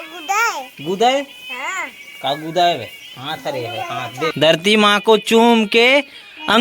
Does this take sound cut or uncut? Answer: cut